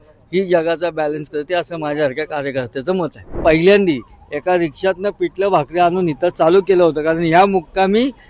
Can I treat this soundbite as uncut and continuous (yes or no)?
no